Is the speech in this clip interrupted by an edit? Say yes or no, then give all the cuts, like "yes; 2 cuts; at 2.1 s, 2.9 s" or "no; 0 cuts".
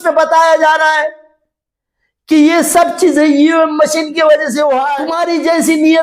yes; 1 cut; at 5.1 s